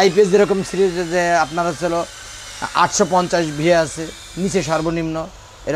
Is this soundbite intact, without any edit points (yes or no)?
yes